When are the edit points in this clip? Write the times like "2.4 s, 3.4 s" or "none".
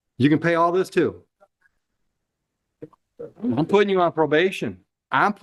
none

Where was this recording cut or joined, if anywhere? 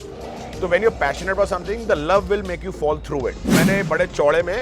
3.5 s

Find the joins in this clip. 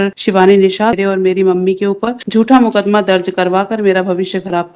1.0 s, 2.1 s

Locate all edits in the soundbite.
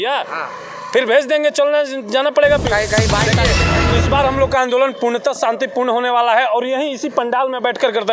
3.5 s

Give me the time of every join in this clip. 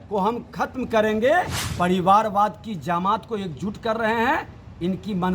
1.6 s

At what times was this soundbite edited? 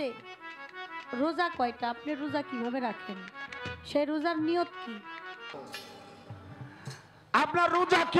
5.5 s

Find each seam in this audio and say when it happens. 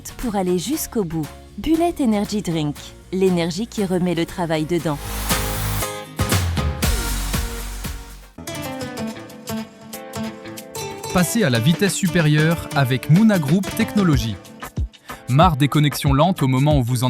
8.4 s

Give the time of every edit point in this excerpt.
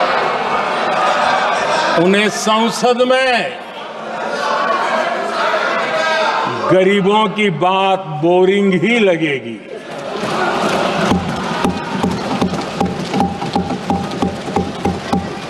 none

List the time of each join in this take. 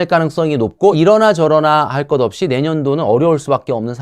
0.9 s

